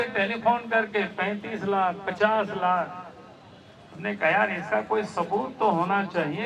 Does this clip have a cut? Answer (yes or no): no